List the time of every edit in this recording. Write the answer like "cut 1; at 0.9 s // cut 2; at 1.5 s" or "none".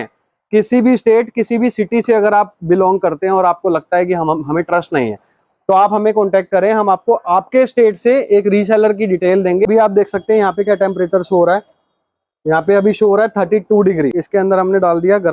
cut 1; at 9.7 s // cut 2; at 14.2 s

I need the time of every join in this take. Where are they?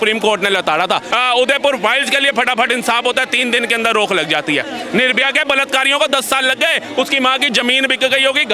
cut 1; at 1.1 s

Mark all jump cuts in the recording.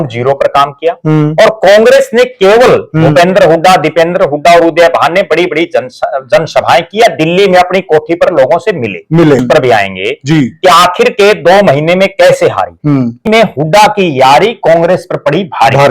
cut 1; at 9.4 s // cut 2; at 13.2 s

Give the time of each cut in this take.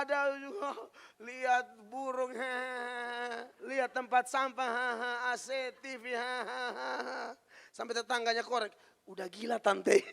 cut 1; at 3.5 s

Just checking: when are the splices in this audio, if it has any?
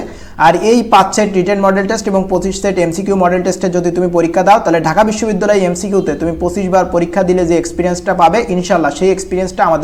none

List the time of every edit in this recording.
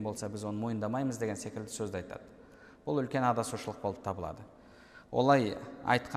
none

